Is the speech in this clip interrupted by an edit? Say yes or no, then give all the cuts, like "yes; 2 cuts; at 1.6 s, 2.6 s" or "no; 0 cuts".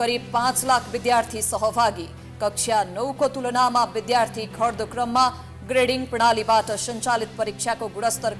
no; 0 cuts